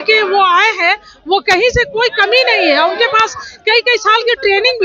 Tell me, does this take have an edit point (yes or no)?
no